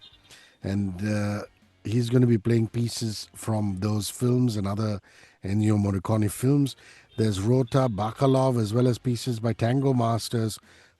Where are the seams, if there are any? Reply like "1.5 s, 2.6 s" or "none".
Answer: none